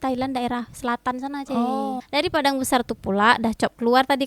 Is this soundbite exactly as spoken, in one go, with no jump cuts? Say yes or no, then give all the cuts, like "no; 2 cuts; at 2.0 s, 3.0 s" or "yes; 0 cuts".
no; 1 cut; at 2.0 s